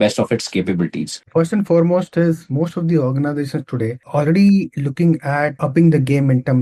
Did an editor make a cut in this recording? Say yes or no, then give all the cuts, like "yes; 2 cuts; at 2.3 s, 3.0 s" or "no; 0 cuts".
yes; 1 cut; at 1.2 s